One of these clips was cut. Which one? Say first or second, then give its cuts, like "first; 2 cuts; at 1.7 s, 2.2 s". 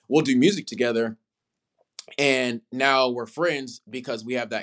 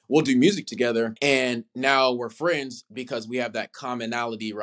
second; 1 cut; at 1.1 s